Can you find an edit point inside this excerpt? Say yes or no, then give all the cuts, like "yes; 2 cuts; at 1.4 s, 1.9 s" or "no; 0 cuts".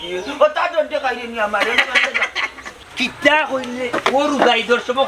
yes; 1 cut; at 2.8 s